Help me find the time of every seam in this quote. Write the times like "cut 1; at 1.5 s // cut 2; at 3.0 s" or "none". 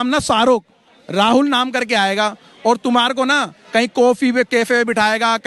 none